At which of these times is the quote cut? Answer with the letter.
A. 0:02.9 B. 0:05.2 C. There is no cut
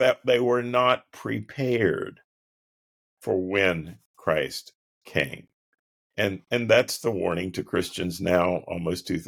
C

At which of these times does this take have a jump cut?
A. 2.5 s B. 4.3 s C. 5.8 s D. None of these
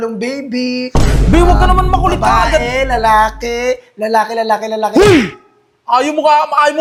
D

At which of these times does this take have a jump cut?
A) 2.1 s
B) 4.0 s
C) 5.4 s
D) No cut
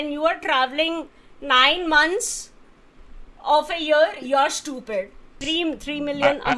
C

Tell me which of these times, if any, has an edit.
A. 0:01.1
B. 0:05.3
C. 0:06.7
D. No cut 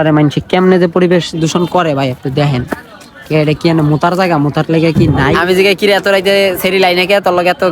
B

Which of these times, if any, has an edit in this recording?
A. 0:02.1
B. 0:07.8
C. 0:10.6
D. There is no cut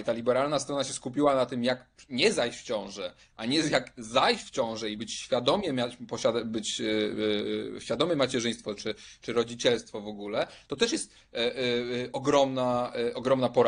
D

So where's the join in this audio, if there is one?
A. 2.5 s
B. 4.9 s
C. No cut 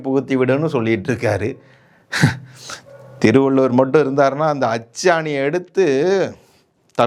C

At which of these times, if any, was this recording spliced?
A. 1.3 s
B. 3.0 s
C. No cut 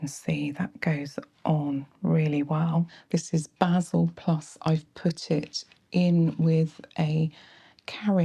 B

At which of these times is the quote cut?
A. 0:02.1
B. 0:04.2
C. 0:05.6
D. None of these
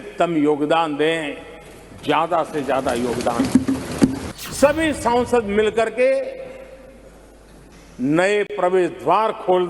B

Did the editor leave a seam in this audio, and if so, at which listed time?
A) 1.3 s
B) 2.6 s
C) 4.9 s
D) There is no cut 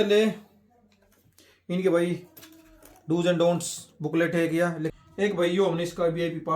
C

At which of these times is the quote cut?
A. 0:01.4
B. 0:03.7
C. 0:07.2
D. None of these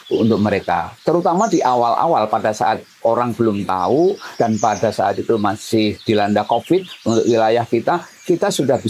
D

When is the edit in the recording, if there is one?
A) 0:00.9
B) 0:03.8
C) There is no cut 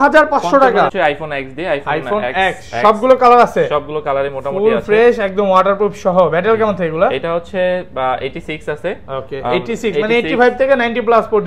A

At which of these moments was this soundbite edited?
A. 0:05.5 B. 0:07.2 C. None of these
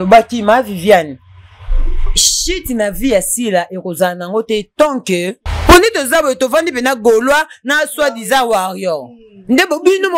A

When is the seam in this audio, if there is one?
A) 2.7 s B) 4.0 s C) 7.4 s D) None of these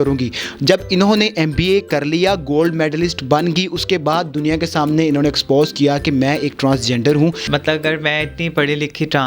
C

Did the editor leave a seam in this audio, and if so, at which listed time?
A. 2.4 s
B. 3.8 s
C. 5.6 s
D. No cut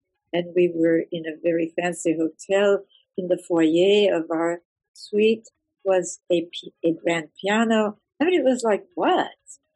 D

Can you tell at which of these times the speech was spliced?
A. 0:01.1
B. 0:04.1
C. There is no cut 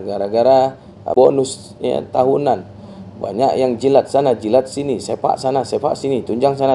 A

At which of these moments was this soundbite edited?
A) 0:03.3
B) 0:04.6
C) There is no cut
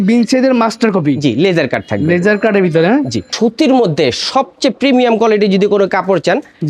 A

